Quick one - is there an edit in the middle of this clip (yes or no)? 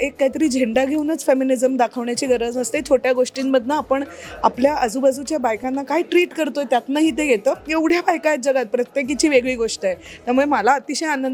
no